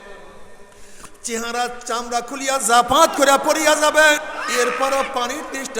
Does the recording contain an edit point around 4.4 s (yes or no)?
yes